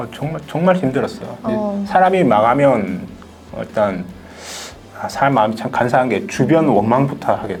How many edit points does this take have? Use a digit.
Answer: 0